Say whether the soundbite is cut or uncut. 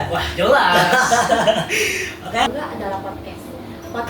cut